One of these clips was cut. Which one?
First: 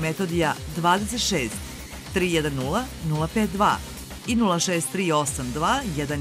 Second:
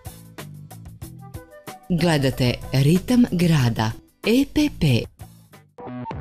second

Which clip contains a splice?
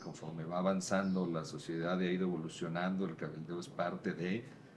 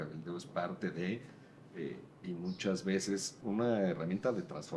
second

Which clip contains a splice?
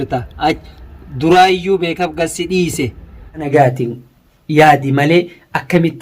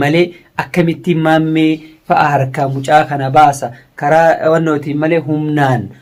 first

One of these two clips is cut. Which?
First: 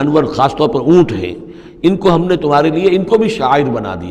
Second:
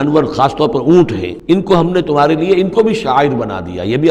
second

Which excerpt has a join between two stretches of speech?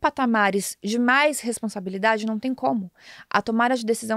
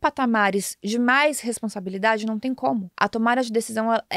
second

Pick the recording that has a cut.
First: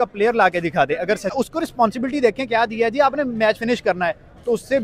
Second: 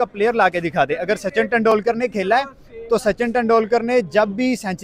first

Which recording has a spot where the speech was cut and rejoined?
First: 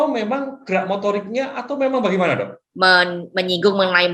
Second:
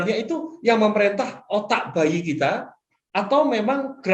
first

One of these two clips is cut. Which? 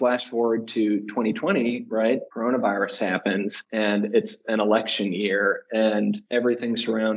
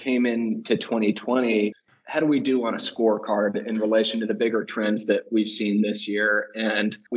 first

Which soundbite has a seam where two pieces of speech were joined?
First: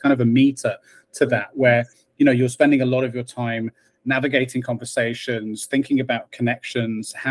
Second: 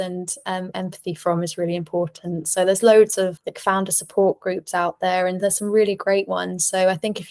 second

